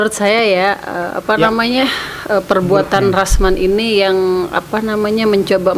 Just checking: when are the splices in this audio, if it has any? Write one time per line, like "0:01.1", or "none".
none